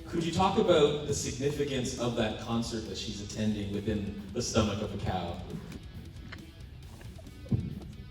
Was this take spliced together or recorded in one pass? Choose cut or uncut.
cut